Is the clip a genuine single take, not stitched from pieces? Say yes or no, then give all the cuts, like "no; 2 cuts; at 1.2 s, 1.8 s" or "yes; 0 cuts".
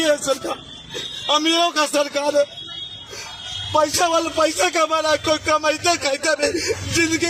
yes; 0 cuts